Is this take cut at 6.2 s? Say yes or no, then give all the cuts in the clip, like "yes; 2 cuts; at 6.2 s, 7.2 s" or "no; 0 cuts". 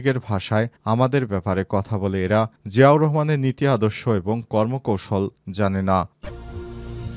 yes; 1 cut; at 6.2 s